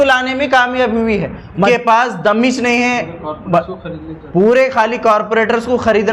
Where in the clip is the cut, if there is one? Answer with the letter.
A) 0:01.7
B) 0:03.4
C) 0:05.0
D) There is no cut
A